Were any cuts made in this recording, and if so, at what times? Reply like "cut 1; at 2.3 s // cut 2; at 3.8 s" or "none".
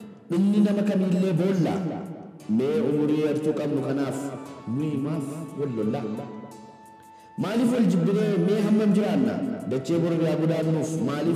none

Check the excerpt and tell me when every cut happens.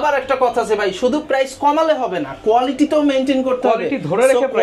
none

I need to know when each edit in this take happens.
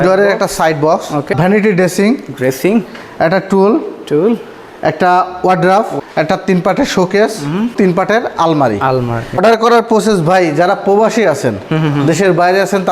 cut 1; at 1.3 s // cut 2; at 5.9 s // cut 3; at 7.7 s // cut 4; at 9.4 s

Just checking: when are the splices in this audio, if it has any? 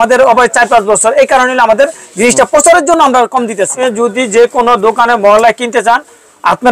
cut 1; at 3.8 s

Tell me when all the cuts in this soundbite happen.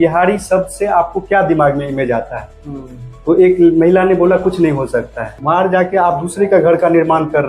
cut 1; at 5.4 s

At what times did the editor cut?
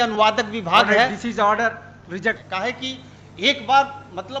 cut 1; at 2.4 s

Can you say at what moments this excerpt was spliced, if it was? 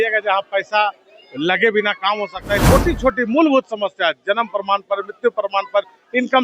cut 1; at 2.6 s

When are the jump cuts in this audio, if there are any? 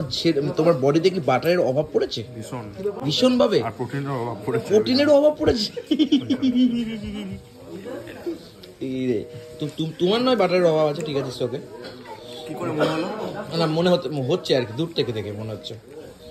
none

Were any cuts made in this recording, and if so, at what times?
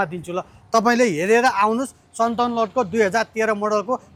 none

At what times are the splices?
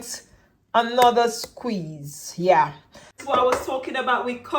cut 1; at 3.1 s

